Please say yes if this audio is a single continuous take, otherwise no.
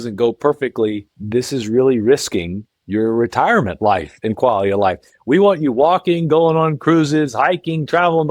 no